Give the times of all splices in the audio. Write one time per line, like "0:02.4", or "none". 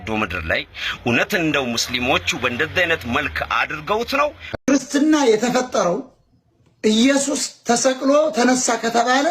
0:04.5